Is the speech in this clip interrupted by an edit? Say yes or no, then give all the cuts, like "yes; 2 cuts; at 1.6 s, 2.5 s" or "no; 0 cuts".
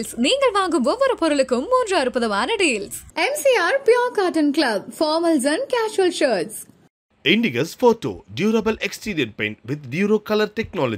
no; 0 cuts